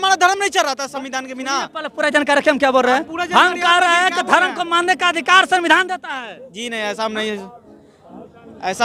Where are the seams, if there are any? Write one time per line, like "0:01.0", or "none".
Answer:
none